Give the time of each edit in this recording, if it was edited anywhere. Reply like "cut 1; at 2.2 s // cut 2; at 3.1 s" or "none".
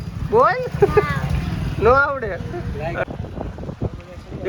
cut 1; at 3.0 s